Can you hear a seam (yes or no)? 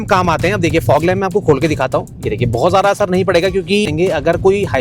yes